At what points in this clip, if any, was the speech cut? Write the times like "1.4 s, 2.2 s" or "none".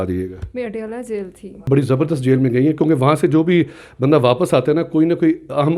1.7 s